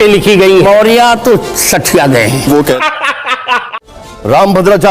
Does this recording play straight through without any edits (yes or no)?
yes